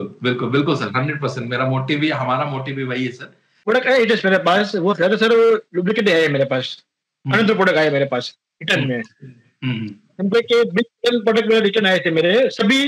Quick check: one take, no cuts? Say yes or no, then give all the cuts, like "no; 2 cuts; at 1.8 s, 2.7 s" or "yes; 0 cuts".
no; 1 cut; at 3.5 s